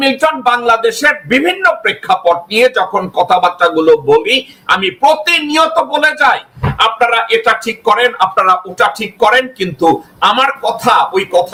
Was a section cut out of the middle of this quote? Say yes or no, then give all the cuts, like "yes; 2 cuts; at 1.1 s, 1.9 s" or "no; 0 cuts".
no; 0 cuts